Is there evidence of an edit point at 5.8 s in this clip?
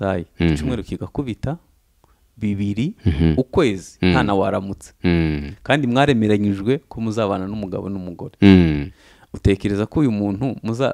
no; 0 cuts

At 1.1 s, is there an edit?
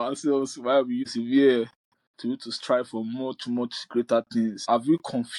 yes; 2 cuts; at 1.1 s, 4.7 s

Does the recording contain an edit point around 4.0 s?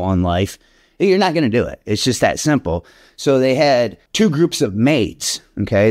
yes; 1 cut; at 4.0 s

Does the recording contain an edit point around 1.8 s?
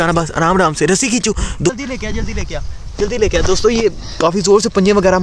yes; 1 cut; at 1.8 s

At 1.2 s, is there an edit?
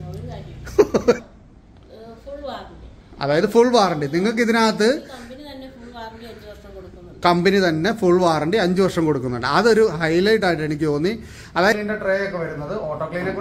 yes; 2 cuts; at 1.2 s, 11.7 s

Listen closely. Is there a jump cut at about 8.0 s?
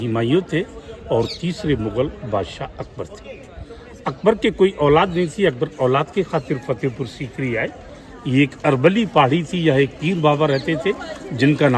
no; 0 cuts

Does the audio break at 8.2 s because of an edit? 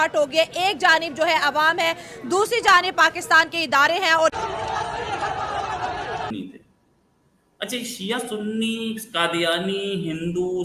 no; 1 cut; at 6.3 s

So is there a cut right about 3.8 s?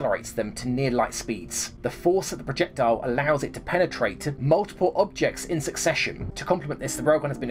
no; 0 cuts

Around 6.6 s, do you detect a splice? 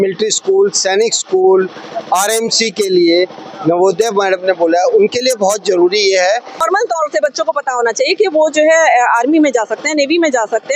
yes; 1 cut; at 6.6 s

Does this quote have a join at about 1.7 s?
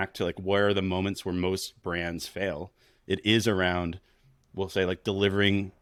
no; 0 cuts

